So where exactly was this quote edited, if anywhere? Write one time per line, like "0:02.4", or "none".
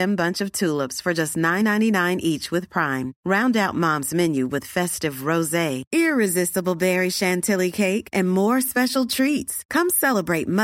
none